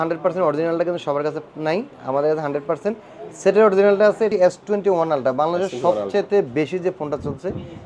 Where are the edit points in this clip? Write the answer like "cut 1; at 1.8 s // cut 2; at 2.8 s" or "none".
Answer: cut 1; at 4.3 s